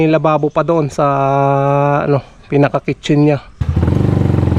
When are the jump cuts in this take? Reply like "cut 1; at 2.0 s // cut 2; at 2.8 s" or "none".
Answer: cut 1; at 3.6 s

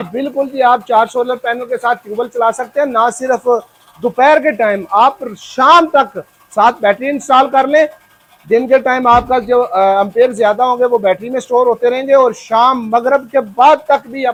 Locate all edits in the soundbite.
none

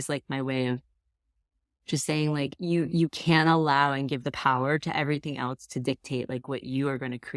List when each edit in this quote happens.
cut 1; at 2.5 s

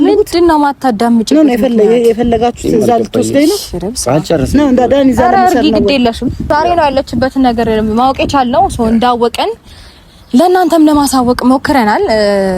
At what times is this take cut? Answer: cut 1; at 6.5 s

